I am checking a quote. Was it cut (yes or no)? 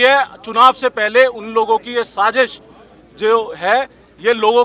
no